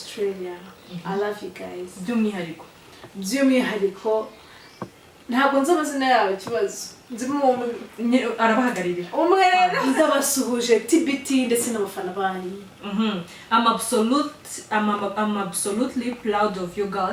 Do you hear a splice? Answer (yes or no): yes